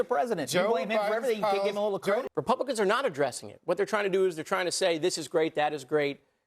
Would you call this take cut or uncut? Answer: cut